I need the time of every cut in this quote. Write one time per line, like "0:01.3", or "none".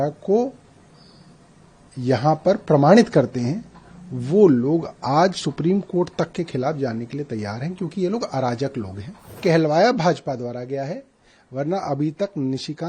0:09.4